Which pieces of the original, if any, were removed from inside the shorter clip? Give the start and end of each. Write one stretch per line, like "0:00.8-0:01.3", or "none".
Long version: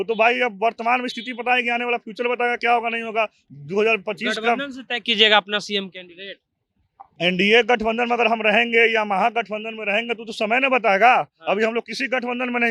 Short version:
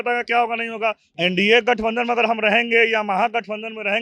0:03.4-0:07.1